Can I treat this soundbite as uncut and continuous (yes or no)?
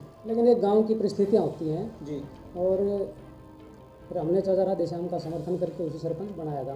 yes